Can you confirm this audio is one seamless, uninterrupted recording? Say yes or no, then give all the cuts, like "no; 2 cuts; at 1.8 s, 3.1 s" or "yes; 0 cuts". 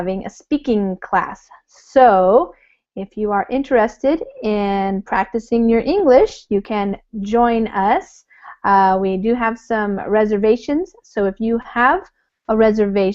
yes; 0 cuts